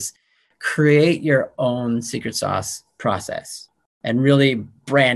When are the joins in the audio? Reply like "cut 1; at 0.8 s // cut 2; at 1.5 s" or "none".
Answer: cut 1; at 4.0 s